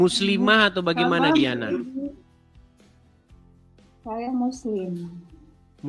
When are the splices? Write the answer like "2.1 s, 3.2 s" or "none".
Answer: 2.2 s, 4.0 s